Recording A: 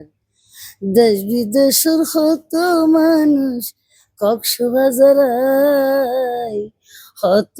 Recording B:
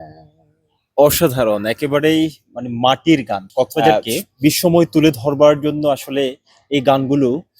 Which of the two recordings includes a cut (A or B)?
B